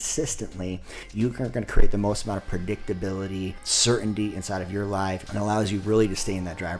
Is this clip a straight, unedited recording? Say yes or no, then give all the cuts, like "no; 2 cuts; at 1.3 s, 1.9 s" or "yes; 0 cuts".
no; 3 cuts; at 0.9 s, 3.7 s, 5.2 s